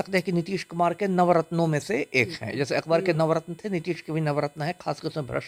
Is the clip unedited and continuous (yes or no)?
yes